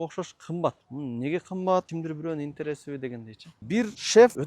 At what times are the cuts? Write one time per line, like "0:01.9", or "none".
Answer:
0:00.9
0:01.9
0:03.6